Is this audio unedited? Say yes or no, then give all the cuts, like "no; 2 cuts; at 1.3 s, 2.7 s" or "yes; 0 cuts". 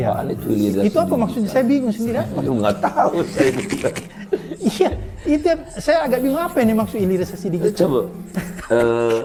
yes; 0 cuts